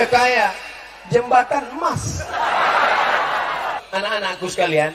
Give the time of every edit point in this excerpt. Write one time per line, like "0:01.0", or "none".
0:03.8

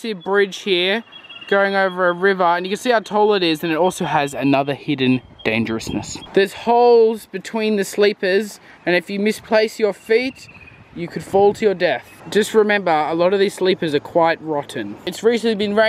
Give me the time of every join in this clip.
0:06.2
0:12.1

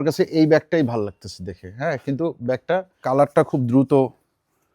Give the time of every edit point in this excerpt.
0:03.0

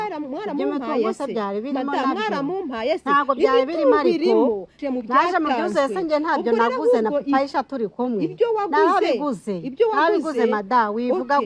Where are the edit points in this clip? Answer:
0:04.8

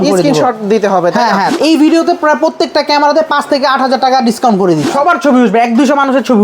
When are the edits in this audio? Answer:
0:01.5
0:04.9

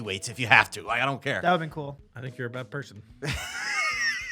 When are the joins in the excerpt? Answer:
0:01.9

